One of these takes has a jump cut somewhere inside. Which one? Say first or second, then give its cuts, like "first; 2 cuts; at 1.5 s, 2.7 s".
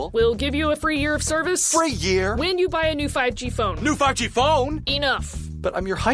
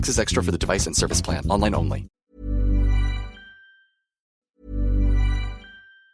second; 2 cuts; at 2.0 s, 4.3 s